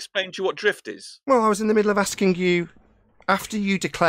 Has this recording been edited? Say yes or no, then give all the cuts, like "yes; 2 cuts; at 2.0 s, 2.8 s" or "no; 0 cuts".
no; 0 cuts